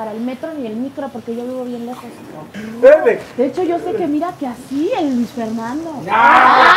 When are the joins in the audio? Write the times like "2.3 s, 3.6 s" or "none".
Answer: 2.6 s